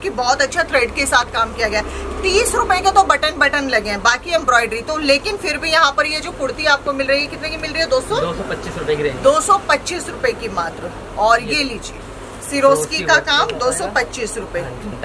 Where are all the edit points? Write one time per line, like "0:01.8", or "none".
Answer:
none